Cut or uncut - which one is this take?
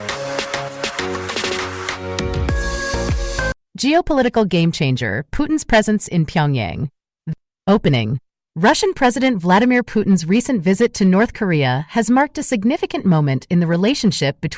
cut